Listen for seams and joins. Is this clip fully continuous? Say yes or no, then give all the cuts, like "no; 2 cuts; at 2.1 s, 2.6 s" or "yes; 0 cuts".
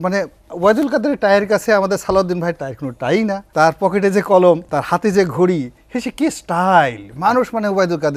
no; 2 cuts; at 3.4 s, 4.7 s